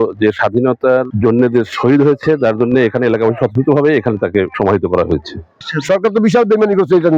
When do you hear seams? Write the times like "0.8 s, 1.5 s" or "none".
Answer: 1.1 s, 4.5 s, 5.5 s